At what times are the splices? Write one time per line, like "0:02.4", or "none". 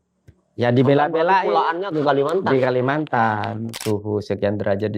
0:03.7